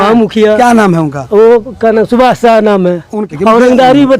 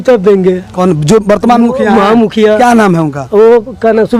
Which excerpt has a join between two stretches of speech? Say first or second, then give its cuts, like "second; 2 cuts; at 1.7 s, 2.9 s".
first; 1 cut; at 3.3 s